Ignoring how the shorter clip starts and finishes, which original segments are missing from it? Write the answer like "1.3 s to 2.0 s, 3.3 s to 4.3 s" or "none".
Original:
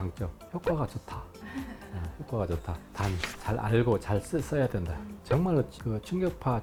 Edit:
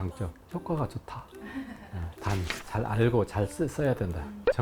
2.1 s to 2.9 s